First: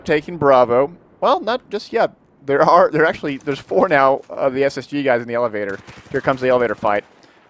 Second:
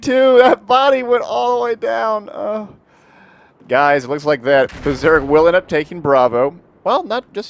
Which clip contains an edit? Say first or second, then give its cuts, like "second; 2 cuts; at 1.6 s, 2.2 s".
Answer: first; 1 cut; at 4.1 s